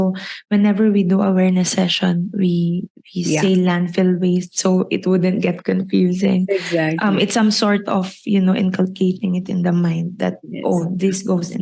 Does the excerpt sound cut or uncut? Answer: uncut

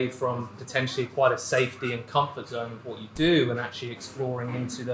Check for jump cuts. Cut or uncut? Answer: uncut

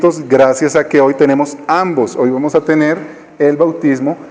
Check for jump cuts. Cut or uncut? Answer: cut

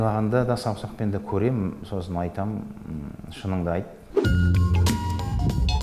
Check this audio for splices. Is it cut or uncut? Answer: cut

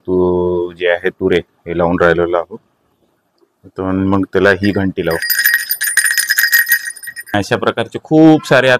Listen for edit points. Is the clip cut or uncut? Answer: cut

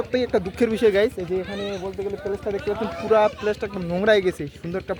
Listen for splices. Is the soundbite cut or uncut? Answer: uncut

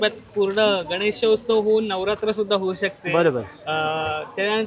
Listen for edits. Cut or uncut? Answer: uncut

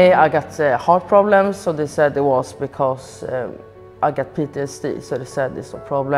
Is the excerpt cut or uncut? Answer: uncut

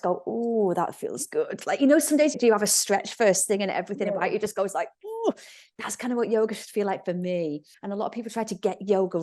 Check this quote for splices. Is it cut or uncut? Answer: cut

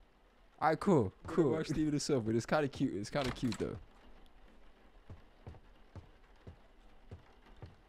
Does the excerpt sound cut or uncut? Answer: cut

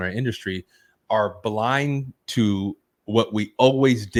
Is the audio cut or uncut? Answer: uncut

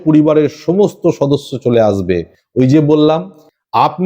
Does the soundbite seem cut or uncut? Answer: uncut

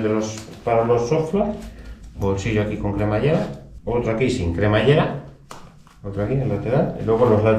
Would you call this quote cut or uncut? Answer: cut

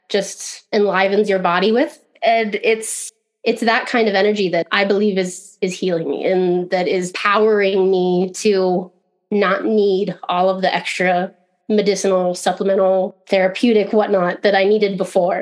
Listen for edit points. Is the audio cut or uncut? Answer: uncut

